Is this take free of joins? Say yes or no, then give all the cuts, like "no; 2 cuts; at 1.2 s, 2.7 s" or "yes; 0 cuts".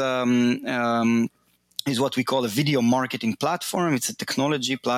yes; 0 cuts